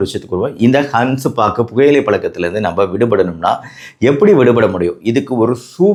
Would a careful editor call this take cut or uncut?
uncut